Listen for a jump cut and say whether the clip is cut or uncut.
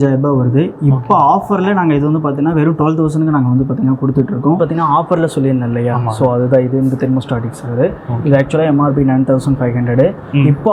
cut